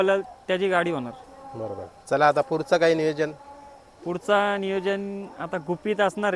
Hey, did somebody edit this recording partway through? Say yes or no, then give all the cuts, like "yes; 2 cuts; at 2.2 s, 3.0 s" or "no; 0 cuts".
no; 0 cuts